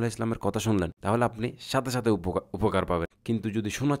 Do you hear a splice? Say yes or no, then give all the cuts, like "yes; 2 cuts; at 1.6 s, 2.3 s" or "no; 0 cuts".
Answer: yes; 2 cuts; at 1.0 s, 3.1 s